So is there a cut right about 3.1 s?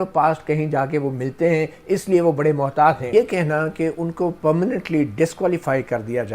yes; 1 cut; at 3.1 s

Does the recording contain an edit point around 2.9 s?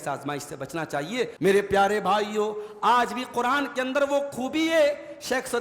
no; 1 cut; at 1.3 s

